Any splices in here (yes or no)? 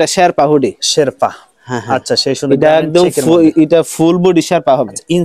no